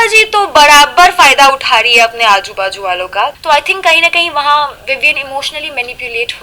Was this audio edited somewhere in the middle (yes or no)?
yes